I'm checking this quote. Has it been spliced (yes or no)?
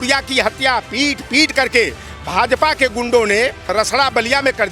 yes